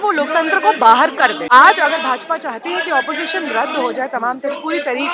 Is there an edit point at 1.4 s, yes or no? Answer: yes